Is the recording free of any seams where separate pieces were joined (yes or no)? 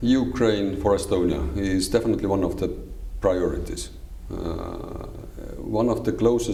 yes